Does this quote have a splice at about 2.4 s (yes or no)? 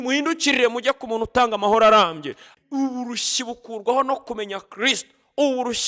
yes